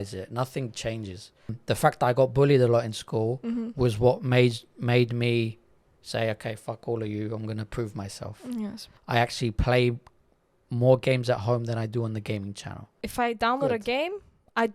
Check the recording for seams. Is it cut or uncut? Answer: cut